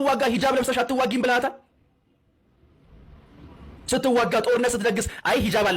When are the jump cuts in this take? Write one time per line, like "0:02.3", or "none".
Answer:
none